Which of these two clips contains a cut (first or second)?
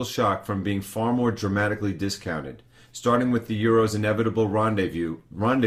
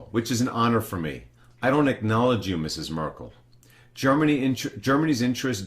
second